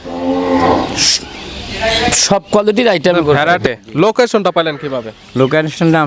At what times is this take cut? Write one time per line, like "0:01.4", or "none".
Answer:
0:03.7